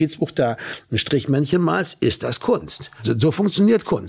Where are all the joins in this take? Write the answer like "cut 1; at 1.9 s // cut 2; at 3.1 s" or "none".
cut 1; at 3.0 s